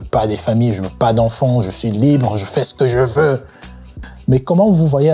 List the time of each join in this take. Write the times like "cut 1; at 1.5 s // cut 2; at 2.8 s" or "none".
cut 1; at 4.1 s